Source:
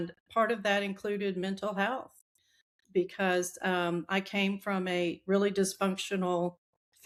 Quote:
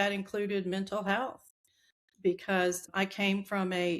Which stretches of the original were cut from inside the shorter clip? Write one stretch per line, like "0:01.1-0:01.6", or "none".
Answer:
0:03.6-0:04.0